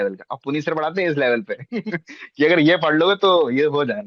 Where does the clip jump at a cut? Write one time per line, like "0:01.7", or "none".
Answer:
none